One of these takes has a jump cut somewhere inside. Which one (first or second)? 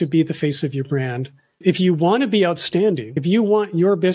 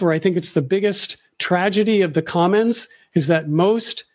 first